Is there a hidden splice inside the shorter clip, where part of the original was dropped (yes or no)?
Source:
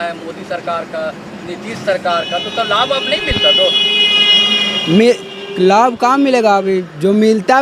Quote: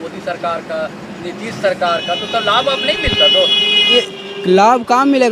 yes